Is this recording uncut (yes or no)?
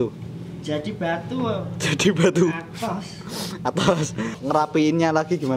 no